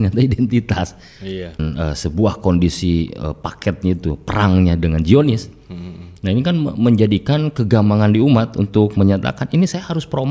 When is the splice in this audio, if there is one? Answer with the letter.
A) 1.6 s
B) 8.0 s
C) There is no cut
A